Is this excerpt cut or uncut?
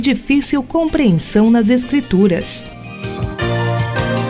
cut